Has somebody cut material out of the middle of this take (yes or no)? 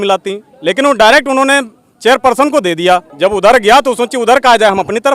yes